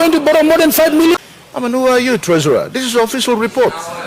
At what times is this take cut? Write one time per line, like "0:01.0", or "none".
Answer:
0:01.2